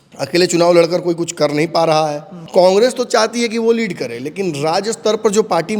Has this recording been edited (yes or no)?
yes